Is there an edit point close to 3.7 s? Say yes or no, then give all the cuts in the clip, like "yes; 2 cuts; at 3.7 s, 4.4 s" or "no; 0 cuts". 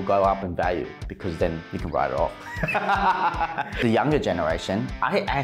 yes; 1 cut; at 3.7 s